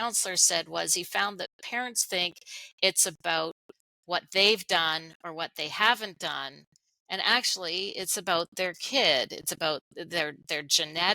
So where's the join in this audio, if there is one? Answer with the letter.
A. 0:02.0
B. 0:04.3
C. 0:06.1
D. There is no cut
A